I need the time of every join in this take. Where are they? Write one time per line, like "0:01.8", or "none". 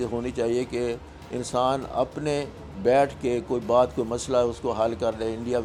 none